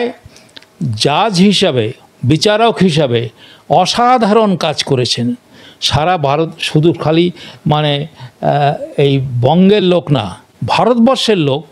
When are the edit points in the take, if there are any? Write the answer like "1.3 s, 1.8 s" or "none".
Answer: none